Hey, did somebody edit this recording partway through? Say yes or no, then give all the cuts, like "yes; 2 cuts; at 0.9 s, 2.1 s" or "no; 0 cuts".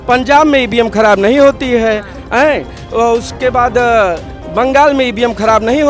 no; 0 cuts